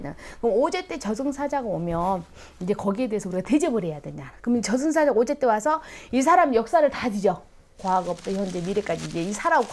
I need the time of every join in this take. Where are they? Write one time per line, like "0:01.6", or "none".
none